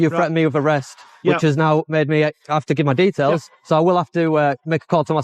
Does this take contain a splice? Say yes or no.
no